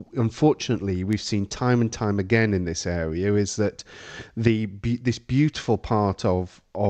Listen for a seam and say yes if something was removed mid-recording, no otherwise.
no